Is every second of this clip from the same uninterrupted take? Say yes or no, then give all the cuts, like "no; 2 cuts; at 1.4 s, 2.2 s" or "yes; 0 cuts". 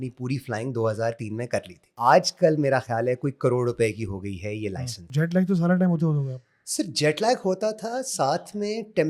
no; 2 cuts; at 1.8 s, 5.0 s